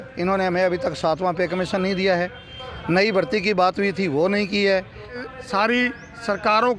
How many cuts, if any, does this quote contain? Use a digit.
1